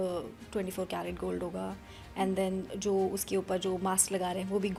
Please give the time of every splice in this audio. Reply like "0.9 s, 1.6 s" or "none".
none